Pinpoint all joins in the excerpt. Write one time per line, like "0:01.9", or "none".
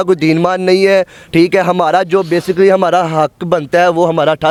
none